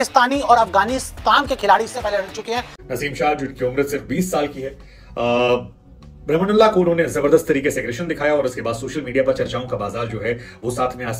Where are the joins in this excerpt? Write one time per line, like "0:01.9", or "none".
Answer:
0:02.7

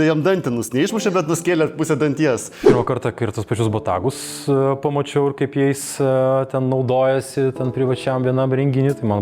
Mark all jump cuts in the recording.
0:02.6

